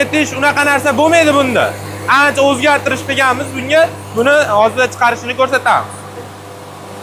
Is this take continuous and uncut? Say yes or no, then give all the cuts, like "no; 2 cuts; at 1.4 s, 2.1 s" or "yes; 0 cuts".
yes; 0 cuts